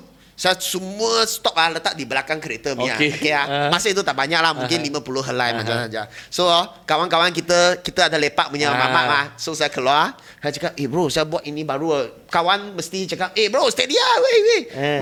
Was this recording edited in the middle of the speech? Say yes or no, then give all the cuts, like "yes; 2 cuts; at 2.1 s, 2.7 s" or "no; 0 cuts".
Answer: no; 0 cuts